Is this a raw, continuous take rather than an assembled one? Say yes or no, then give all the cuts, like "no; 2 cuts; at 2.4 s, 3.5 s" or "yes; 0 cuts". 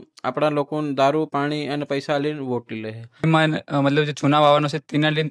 no; 1 cut; at 3.3 s